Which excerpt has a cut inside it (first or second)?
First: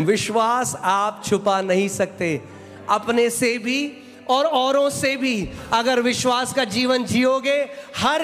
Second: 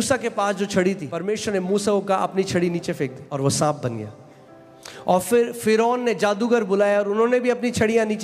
second